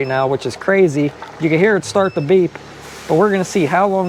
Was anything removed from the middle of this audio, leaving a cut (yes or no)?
no